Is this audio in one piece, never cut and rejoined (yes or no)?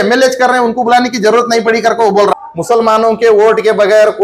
no